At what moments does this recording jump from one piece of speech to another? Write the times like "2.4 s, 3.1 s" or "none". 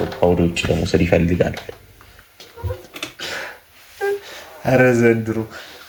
none